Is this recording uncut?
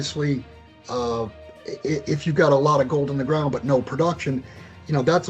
yes; 0 cuts

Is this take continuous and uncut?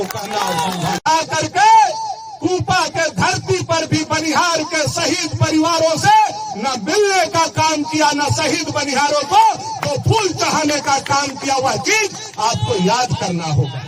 no; 2 cuts; at 1.1 s, 5.5 s

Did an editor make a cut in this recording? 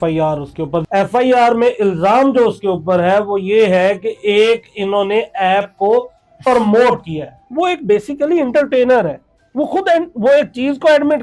yes; 2 cuts; at 0.8 s, 7.4 s

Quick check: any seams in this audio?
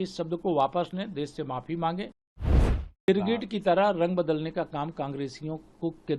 yes; 1 cut; at 2.5 s

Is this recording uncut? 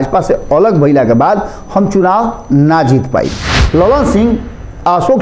no; 1 cut; at 3.6 s

